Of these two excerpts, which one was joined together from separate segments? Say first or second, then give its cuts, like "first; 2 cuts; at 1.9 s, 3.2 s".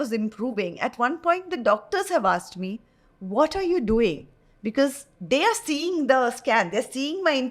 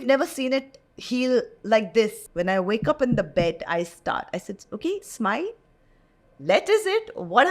second; 1 cut; at 2.2 s